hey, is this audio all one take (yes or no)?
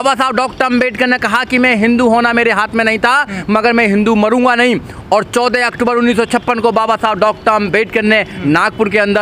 yes